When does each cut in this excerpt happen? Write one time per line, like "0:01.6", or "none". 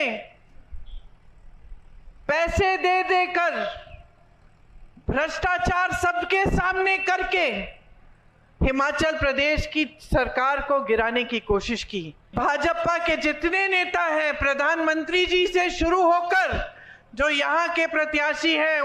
0:12.3